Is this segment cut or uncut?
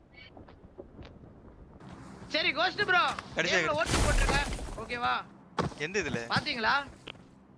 cut